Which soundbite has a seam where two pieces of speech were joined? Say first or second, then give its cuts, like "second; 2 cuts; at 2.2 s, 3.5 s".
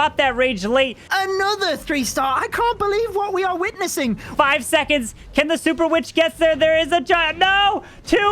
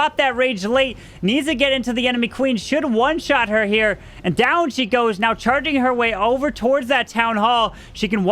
first; 2 cuts; at 1.0 s, 4.2 s